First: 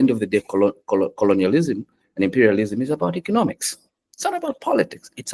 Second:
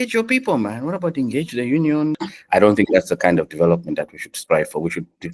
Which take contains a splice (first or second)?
second